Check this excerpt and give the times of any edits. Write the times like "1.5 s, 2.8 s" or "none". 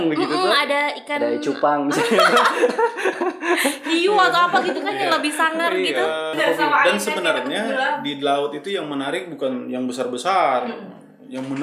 6.3 s